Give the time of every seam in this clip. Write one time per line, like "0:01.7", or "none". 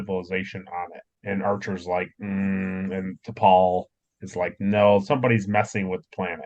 0:01.1